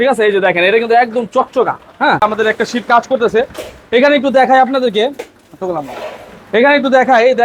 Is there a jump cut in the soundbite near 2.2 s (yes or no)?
yes